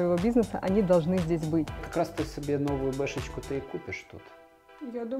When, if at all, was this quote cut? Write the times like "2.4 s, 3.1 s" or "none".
1.9 s